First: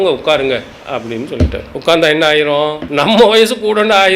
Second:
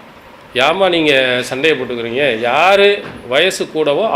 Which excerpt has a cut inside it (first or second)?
first